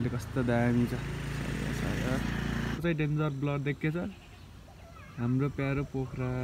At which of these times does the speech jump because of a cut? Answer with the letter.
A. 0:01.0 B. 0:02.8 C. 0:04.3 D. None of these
B